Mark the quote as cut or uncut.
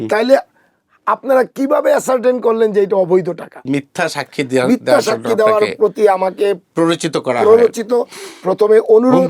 cut